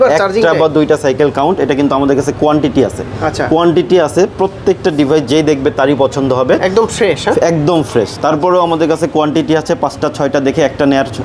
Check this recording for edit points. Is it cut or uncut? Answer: uncut